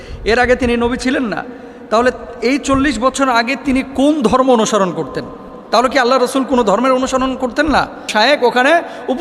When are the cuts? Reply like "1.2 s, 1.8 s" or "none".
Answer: 8.1 s